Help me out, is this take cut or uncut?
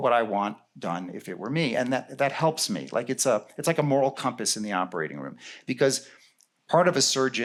uncut